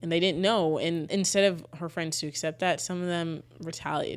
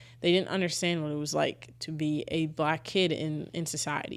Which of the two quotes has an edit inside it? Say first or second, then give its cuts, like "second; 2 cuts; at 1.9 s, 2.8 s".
first; 1 cut; at 1.1 s